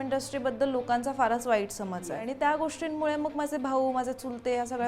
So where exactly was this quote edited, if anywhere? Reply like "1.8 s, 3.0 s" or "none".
2.1 s